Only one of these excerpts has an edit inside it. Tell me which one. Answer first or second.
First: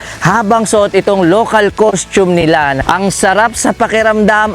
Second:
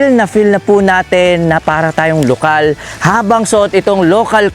first